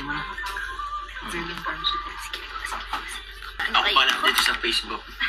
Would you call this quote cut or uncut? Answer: cut